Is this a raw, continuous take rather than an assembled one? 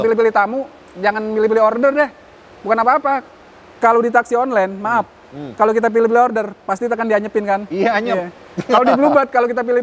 yes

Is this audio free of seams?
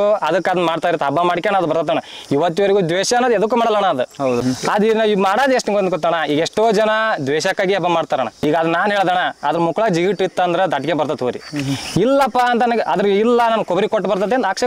no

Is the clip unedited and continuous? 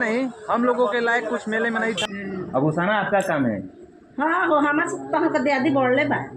no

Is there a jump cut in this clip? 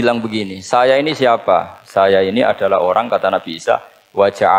no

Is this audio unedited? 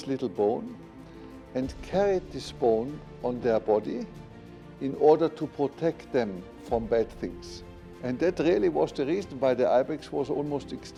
yes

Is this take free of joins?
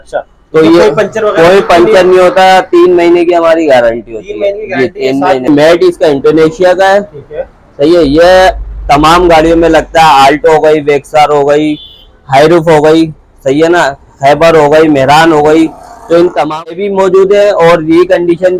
no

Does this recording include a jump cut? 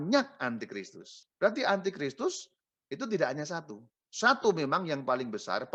no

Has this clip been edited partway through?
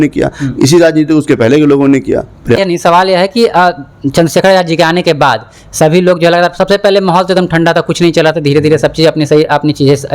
yes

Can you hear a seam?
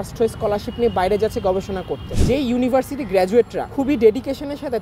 yes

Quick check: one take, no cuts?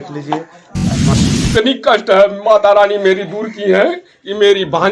no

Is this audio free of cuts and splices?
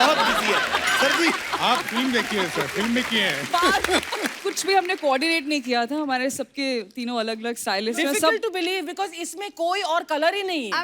no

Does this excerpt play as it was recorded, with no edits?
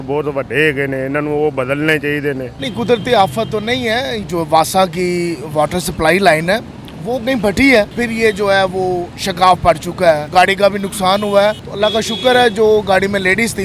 no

